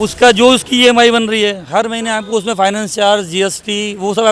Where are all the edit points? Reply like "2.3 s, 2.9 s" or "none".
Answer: none